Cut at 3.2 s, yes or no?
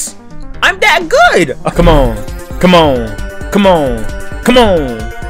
no